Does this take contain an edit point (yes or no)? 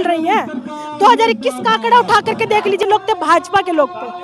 yes